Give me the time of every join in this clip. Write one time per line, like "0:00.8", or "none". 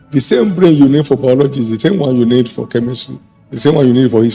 none